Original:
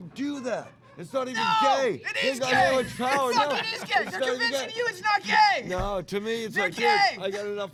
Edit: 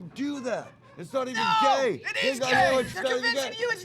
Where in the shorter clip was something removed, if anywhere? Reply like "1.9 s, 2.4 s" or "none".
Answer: 2.9 s